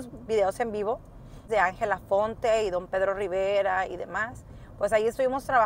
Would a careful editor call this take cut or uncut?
uncut